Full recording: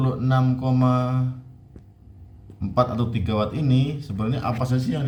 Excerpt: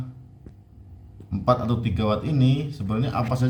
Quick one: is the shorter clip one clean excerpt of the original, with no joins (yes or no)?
yes